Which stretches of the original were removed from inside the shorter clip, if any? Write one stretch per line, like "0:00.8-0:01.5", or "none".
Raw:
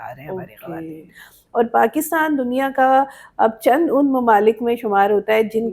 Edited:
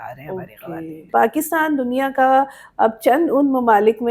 0:01.1-0:01.7

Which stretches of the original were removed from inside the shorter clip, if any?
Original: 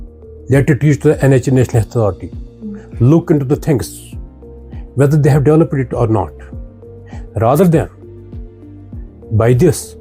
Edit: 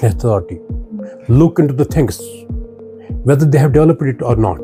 none

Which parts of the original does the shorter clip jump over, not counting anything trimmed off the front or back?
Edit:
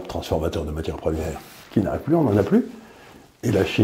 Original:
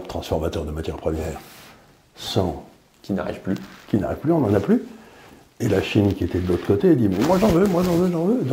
0:01.6-0:03.7

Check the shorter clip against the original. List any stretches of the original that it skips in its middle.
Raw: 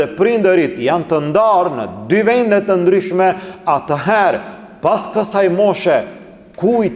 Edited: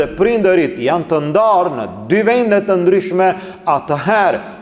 none

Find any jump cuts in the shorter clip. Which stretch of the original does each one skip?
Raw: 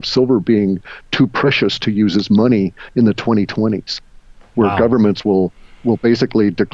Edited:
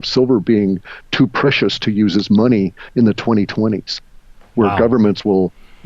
none

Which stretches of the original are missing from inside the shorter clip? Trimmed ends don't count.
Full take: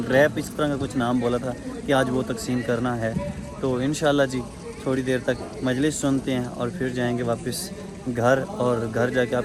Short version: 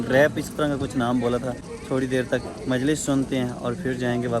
0:01.7-0:04.6

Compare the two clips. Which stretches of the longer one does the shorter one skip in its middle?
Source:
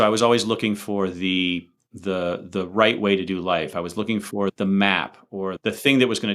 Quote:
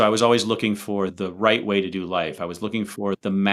0:01.1-0:02.5

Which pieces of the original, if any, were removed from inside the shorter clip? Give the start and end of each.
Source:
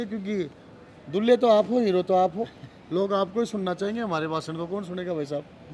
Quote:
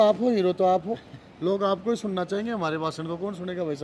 none

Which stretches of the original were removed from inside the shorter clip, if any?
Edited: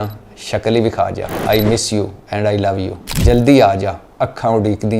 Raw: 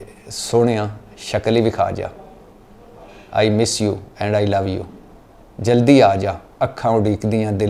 0:02.1-0:03.2
0:04.9-0:05.4

